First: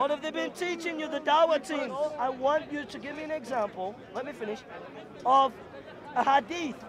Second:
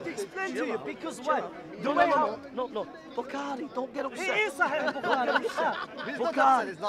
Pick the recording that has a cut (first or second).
first